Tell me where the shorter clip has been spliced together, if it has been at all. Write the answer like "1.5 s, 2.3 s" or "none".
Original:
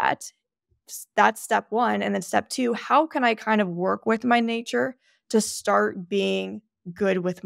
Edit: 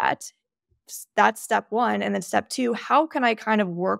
none